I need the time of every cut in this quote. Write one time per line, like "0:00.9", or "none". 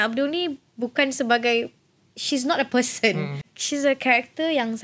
0:03.5

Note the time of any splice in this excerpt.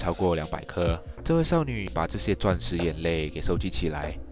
0:01.1
0:01.9

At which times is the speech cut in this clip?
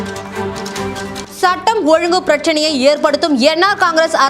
0:01.2

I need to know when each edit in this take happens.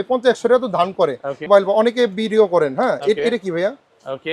0:01.5

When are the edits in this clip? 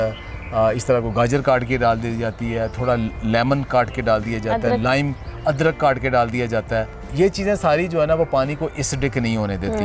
0:07.0

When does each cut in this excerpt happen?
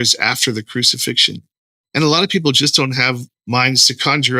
0:03.3

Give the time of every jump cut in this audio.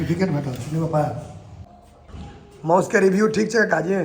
0:01.7

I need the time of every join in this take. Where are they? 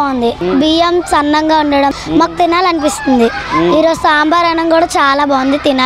none

